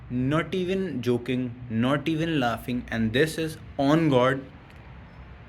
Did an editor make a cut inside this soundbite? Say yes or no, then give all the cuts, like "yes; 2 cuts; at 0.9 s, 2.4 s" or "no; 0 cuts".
yes; 1 cut; at 4.3 s